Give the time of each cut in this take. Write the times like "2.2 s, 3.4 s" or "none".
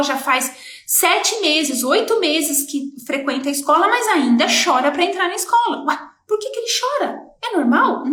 none